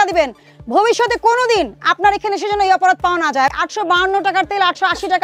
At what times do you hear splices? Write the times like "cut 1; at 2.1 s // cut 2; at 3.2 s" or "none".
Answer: cut 1; at 3.5 s